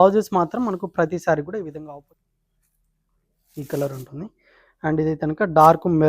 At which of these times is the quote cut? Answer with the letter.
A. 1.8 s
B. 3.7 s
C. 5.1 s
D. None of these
A